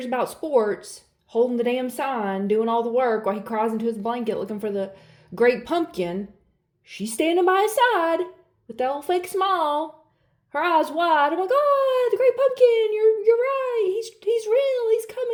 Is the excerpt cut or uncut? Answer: uncut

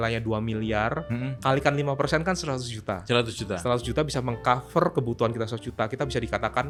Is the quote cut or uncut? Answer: uncut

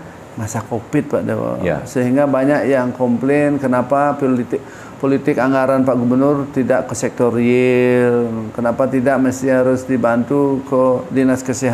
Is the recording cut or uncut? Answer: uncut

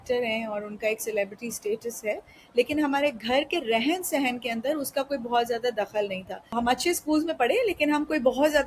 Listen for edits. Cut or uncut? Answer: cut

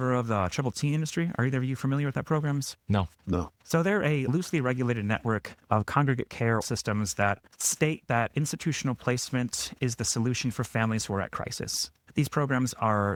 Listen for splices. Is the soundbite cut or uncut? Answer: uncut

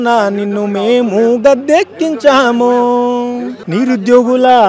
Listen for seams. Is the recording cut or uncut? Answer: cut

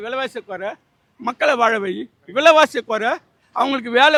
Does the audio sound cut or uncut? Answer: uncut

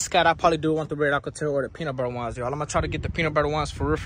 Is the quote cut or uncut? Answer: uncut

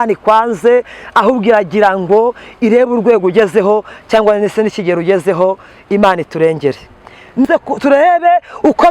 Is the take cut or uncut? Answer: cut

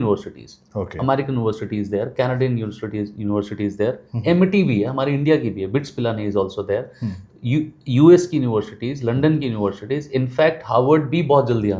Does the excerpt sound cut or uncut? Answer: uncut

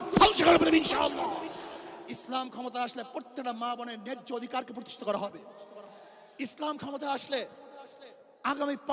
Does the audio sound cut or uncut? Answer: cut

